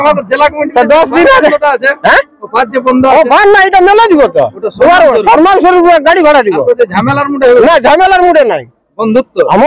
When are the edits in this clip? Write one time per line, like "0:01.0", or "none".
none

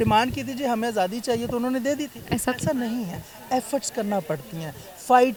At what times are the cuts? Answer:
none

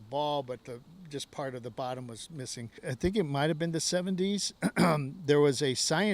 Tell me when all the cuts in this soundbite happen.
0:02.9

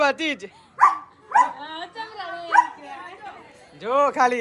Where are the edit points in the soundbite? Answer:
none

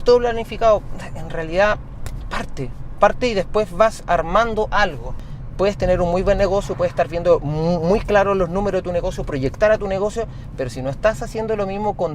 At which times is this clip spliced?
0:05.3

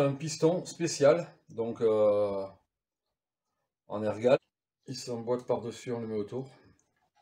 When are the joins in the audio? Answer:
0:04.4

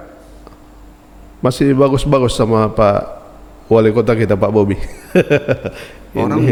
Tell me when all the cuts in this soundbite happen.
none

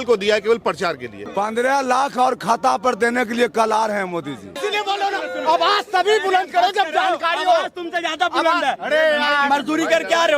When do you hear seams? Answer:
0:01.2
0:04.6

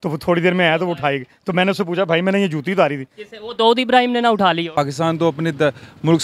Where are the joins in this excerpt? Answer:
0:04.8

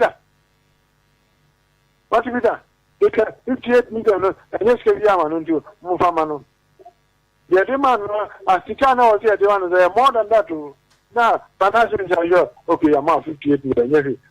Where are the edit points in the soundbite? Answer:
0:13.0

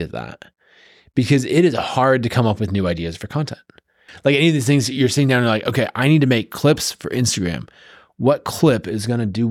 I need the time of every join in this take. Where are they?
0:04.1

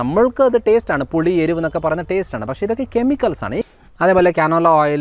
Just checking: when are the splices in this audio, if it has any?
0:03.6

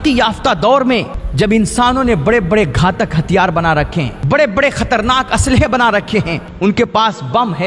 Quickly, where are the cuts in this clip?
0:01.2
0:04.2
0:06.4

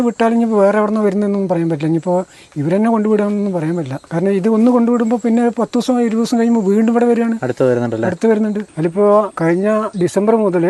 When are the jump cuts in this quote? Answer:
0:04.0
0:08.7
0:09.6

